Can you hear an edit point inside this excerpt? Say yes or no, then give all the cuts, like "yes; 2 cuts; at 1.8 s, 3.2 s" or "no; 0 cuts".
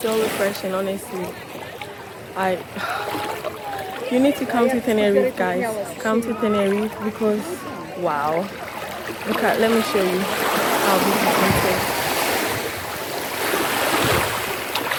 no; 0 cuts